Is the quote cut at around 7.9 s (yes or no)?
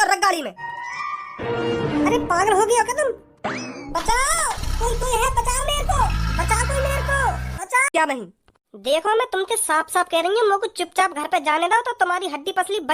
yes